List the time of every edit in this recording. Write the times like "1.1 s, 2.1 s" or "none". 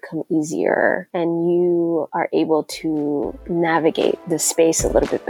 1.1 s, 2.1 s, 3.4 s, 4.2 s